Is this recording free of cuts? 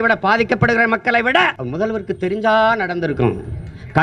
no; 1 cut; at 1.6 s

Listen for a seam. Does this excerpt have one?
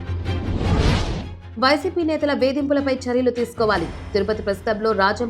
yes; 1 cut; at 1.4 s

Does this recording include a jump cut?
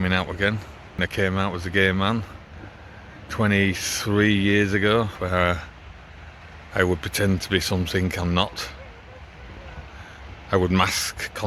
yes; 2 cuts; at 1.1 s, 5.1 s

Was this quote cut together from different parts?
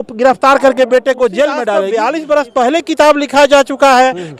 yes; 1 cut; at 1.9 s

